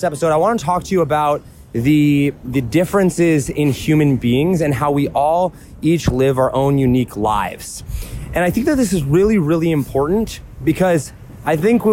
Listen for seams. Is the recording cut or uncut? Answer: uncut